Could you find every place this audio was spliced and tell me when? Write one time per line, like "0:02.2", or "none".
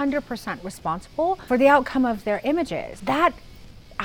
0:01.4
0:02.9

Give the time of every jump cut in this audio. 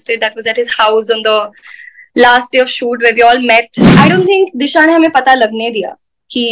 0:03.8

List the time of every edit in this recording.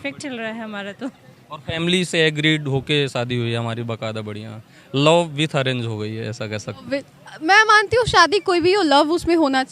none

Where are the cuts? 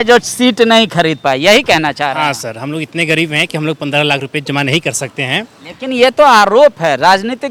none

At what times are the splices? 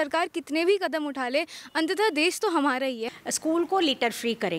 0:03.1

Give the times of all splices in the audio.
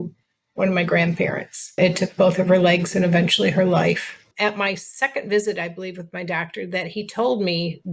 0:01.8
0:04.3

